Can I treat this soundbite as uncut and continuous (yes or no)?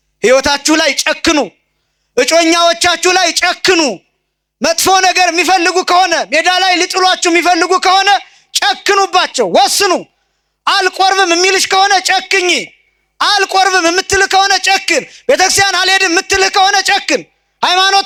yes